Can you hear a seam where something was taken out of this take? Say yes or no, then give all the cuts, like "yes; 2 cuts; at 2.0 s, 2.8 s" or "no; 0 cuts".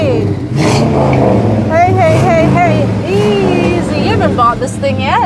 no; 0 cuts